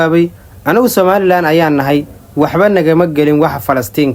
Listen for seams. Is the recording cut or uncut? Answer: uncut